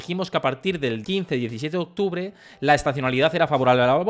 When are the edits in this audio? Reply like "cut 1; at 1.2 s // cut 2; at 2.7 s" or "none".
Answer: cut 1; at 1.0 s